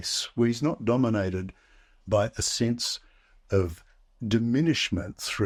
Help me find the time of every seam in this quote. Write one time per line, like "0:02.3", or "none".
none